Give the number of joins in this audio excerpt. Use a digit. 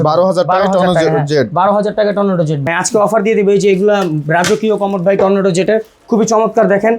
1